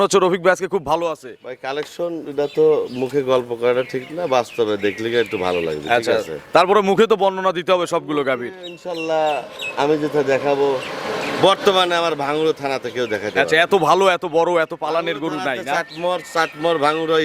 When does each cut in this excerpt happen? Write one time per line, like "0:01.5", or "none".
none